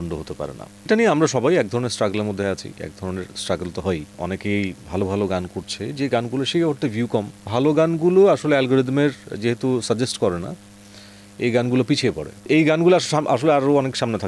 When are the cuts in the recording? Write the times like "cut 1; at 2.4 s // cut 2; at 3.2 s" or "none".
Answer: cut 1; at 4.1 s // cut 2; at 7.5 s // cut 3; at 12.4 s